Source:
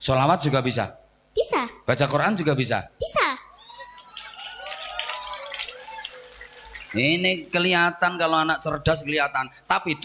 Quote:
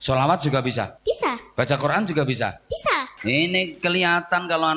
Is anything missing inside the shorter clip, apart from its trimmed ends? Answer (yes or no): yes